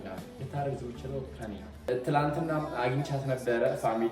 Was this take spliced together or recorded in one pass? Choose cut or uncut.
cut